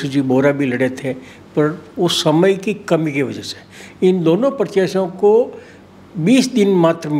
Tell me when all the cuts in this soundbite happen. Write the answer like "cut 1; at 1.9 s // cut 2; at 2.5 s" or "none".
none

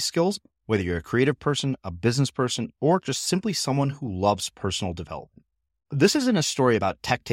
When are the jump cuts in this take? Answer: none

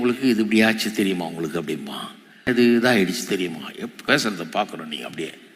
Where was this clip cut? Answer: cut 1; at 2.5 s // cut 2; at 4.1 s

